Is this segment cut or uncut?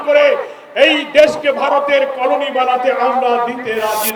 uncut